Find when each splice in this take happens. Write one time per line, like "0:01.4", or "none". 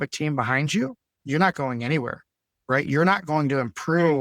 0:01.1